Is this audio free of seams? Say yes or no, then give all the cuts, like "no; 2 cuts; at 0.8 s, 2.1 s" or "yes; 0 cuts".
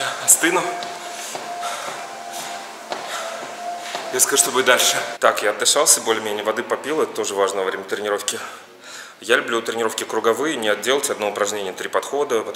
yes; 0 cuts